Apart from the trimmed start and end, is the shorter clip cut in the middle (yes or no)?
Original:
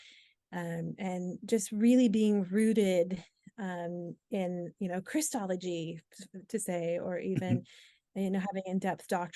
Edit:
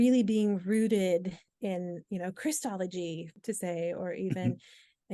yes